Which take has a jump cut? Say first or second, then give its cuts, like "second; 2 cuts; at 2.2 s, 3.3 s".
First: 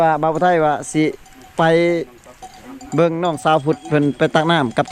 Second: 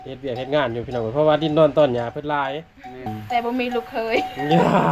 second; 1 cut; at 3.1 s